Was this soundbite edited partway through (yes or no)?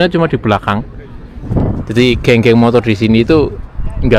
yes